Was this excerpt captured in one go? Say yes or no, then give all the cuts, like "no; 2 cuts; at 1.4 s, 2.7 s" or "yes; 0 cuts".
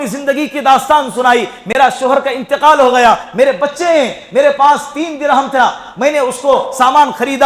yes; 0 cuts